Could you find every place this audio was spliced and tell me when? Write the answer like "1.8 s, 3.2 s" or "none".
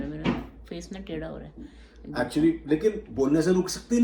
none